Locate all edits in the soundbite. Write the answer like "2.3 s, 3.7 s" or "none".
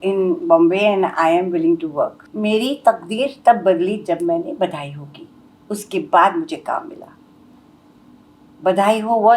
2.2 s